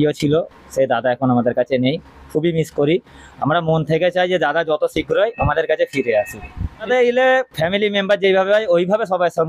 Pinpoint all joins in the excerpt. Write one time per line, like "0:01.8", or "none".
0:06.9